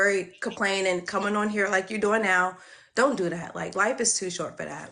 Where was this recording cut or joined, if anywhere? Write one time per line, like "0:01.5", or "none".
none

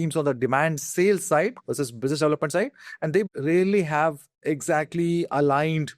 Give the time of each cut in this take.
0:03.3
0:04.3

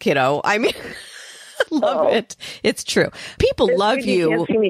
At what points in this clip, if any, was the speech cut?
0:01.7
0:03.4

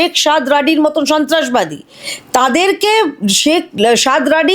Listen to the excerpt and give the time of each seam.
none

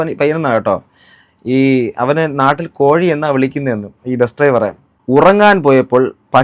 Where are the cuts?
0:04.9

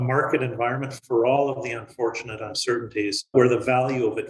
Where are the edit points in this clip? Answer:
0:03.3

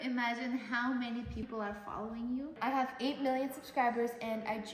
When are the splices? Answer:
0:02.5

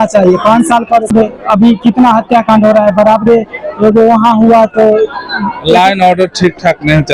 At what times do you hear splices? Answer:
0:01.1

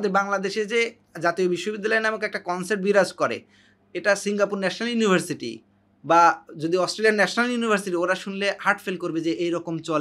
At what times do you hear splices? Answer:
none

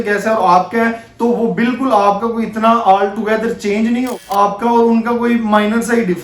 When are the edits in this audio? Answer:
0:04.1

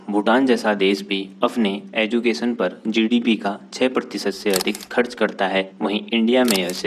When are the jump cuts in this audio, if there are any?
none

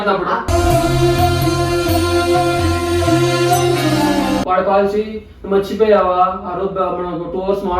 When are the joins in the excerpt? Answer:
0:04.4

